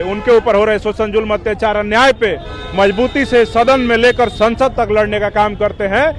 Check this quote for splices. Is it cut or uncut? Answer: uncut